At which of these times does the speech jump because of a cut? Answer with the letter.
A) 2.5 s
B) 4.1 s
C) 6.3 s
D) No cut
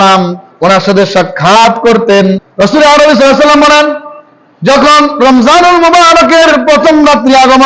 A